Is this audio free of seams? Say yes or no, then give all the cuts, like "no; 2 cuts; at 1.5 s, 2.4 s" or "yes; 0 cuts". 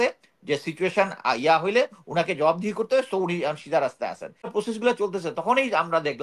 no; 1 cut; at 4.5 s